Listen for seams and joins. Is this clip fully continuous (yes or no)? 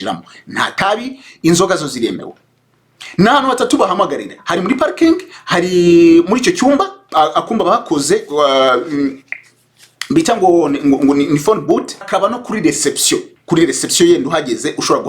no